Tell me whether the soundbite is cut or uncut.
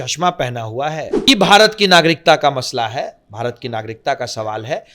cut